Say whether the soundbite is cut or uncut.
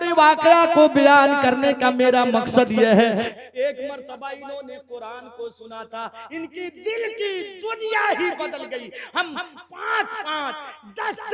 cut